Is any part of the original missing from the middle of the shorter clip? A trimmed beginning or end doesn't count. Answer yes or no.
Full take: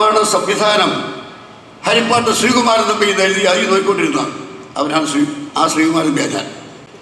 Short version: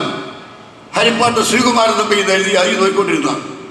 no